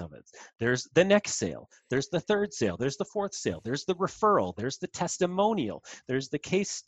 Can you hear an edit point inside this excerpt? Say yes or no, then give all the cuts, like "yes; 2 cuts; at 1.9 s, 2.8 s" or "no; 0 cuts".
no; 0 cuts